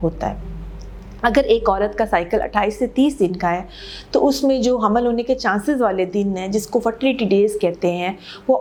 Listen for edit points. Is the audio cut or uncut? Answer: uncut